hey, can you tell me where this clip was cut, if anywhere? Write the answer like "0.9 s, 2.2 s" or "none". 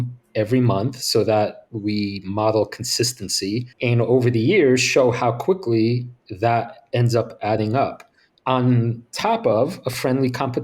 1.7 s, 3.7 s